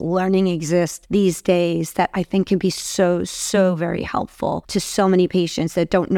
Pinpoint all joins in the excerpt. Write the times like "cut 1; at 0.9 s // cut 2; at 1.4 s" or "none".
cut 1; at 1.0 s // cut 2; at 4.6 s